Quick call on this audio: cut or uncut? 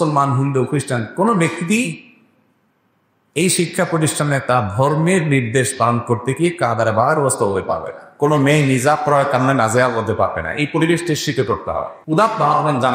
cut